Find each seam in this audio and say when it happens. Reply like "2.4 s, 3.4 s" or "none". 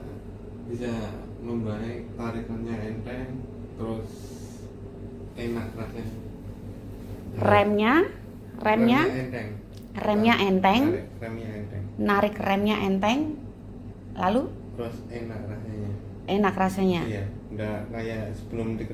none